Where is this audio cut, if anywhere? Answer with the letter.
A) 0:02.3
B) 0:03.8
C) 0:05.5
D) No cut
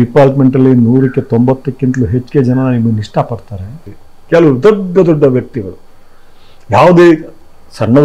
B